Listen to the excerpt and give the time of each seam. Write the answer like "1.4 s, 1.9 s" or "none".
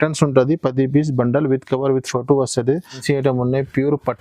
3.0 s